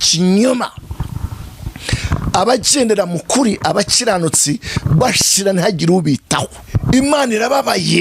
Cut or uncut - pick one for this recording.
cut